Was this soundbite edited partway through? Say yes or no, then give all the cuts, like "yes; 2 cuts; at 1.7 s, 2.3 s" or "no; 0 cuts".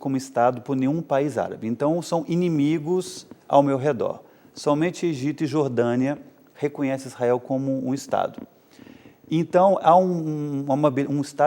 no; 0 cuts